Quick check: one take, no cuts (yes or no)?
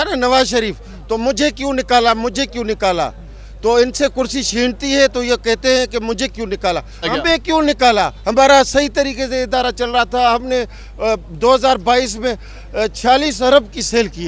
no